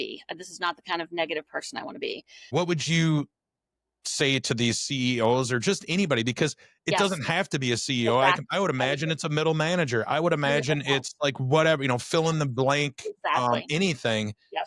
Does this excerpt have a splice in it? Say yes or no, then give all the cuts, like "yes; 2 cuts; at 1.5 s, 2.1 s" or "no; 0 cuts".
yes; 1 cut; at 2.5 s